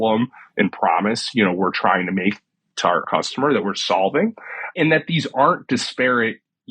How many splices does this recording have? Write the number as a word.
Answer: two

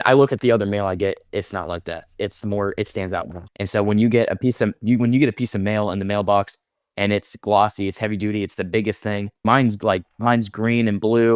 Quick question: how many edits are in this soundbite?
zero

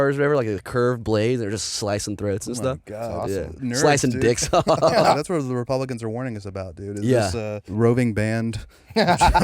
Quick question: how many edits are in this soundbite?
two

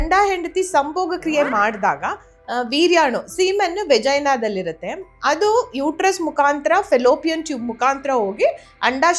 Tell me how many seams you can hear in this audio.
zero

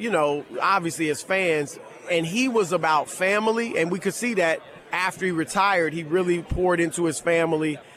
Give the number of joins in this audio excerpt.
one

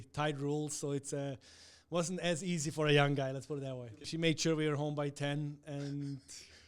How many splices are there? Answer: one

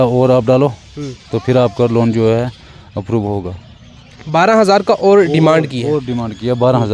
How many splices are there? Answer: zero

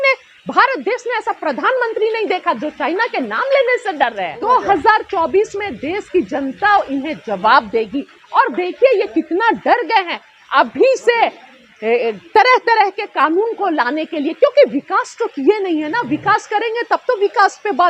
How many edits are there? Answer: one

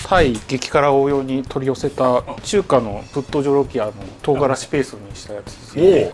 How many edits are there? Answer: two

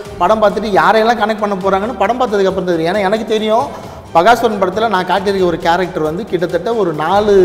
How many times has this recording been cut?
zero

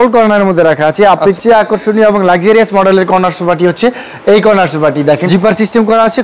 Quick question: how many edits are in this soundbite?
two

